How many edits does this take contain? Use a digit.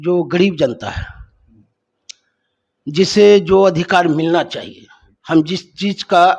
0